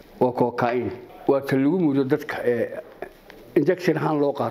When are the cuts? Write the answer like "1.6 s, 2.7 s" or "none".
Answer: 1.1 s